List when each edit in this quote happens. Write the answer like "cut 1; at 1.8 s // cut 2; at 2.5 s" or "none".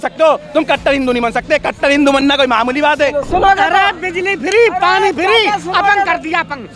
cut 1; at 3.2 s